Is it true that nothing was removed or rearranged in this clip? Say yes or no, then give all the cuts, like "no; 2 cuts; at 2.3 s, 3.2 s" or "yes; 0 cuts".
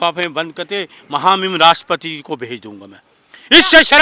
yes; 0 cuts